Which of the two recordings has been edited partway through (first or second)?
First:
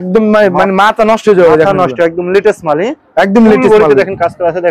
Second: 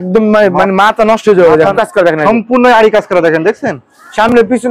second